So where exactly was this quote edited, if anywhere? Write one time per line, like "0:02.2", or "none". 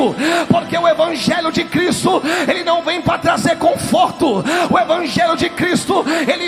none